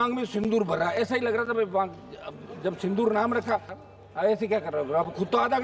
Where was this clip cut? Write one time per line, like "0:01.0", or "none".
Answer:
0:03.8